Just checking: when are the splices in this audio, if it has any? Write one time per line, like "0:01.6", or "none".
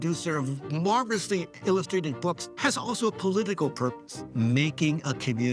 0:02.4
0:04.2